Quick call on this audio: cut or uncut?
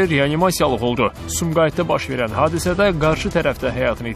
uncut